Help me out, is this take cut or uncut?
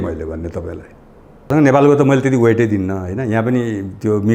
cut